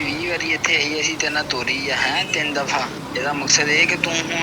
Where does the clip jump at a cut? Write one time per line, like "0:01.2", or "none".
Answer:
0:03.0